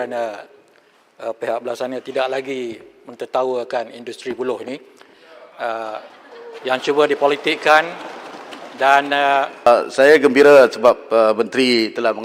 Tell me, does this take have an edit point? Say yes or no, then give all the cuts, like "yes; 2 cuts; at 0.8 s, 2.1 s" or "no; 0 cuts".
yes; 1 cut; at 9.7 s